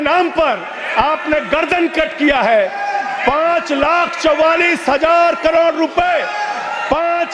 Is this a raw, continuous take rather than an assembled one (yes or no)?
yes